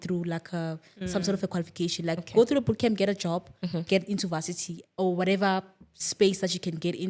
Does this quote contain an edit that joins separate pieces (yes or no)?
no